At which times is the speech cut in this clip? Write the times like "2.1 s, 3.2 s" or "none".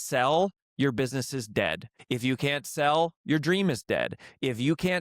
1.9 s